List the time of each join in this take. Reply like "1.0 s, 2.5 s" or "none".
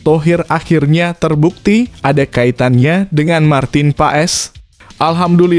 none